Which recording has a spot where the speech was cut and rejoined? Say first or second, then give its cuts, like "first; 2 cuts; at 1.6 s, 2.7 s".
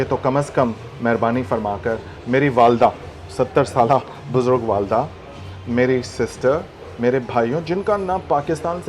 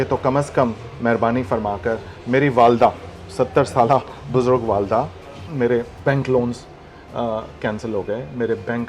second; 1 cut; at 5.5 s